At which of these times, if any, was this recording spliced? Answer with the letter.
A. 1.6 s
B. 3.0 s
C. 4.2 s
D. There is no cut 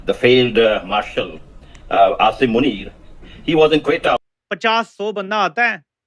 C